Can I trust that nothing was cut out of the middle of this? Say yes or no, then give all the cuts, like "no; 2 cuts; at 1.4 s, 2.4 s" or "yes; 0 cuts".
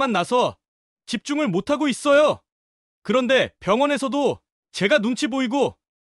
yes; 0 cuts